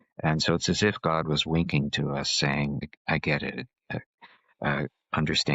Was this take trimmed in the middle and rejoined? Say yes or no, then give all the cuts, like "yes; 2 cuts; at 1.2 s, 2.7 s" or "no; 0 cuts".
yes; 1 cut; at 2.9 s